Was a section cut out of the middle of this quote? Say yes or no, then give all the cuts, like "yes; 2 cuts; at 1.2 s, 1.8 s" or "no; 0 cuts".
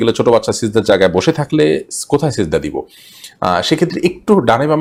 no; 0 cuts